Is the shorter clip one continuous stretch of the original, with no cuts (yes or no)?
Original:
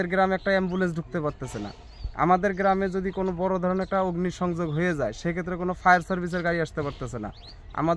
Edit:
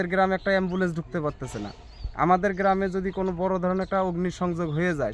yes